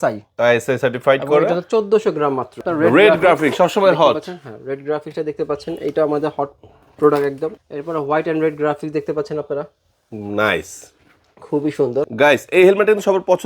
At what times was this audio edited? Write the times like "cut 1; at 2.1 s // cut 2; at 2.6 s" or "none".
cut 1; at 2.6 s // cut 2; at 7.5 s // cut 3; at 12.1 s